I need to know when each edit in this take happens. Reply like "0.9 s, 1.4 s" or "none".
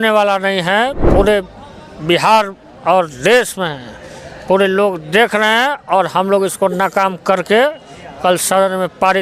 none